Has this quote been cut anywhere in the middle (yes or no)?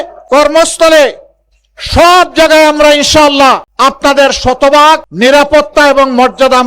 yes